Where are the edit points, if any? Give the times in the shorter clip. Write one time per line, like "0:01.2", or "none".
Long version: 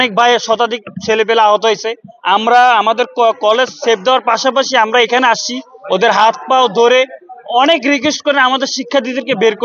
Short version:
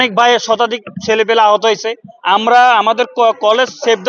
none